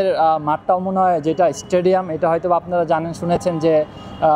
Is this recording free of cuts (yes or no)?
yes